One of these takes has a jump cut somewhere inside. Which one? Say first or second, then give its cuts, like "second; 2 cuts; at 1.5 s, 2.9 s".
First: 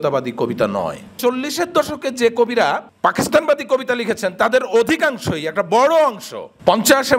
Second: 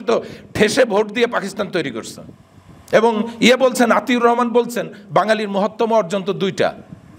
first; 2 cuts; at 1.1 s, 2.9 s